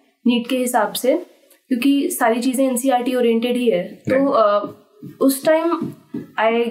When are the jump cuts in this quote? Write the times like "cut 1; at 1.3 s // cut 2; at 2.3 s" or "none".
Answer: none